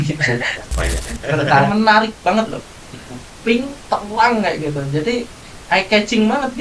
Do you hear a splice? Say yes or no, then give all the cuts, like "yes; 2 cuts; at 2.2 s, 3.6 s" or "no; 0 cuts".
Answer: yes; 1 cut; at 1.7 s